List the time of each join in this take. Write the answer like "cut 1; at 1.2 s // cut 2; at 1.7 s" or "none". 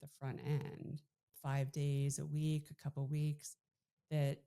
cut 1; at 1.4 s